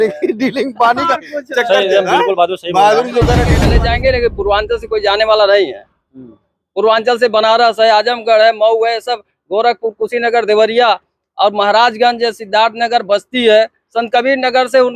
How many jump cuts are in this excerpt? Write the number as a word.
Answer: one